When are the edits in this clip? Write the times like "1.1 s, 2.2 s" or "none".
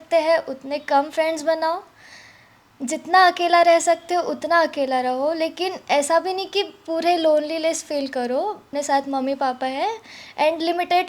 8.7 s